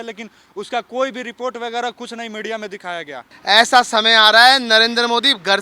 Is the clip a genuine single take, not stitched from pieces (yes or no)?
no